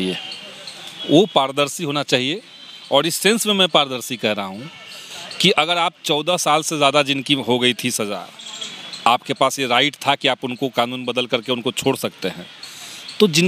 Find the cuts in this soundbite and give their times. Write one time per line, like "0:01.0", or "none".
none